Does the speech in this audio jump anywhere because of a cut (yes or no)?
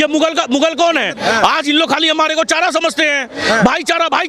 yes